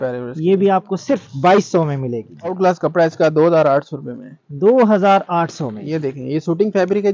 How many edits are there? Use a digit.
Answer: 1